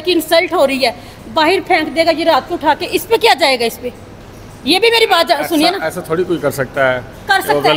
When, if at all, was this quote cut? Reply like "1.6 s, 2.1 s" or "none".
none